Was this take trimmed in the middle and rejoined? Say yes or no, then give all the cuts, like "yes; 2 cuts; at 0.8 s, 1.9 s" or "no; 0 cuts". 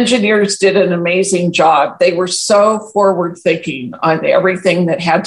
no; 0 cuts